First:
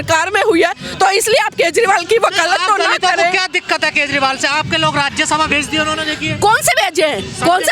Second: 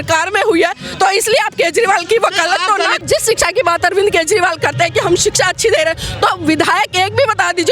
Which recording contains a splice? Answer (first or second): second